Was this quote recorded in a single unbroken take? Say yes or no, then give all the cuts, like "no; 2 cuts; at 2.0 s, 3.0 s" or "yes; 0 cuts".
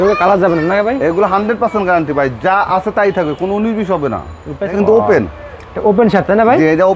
no; 1 cut; at 4.8 s